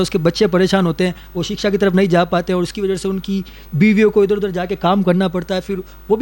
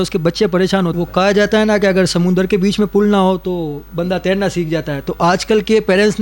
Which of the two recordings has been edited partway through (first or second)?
second